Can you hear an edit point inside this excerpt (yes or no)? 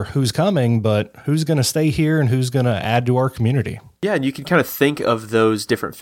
yes